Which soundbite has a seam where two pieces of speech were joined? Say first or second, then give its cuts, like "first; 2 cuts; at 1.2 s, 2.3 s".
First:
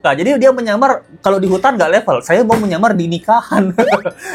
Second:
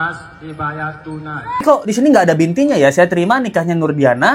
second; 1 cut; at 1.6 s